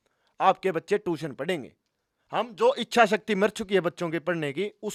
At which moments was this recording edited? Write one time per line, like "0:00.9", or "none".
none

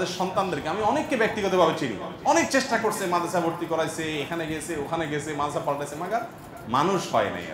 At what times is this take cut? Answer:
none

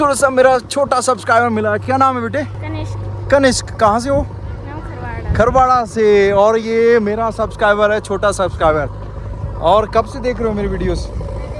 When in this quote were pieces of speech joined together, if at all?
none

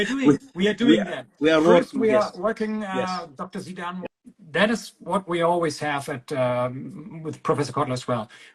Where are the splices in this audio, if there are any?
0:03.8

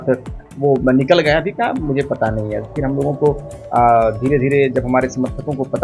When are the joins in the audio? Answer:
none

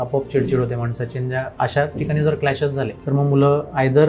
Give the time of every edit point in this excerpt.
0:03.0

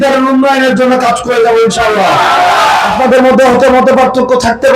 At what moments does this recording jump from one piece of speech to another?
0:02.9

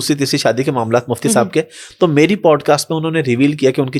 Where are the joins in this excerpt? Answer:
none

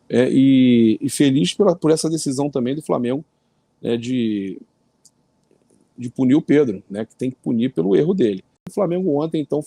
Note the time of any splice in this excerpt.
0:08.7

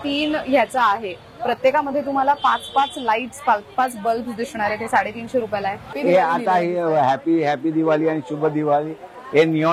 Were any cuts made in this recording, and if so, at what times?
0:05.9

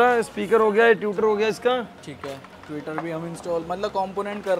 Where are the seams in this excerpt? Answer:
none

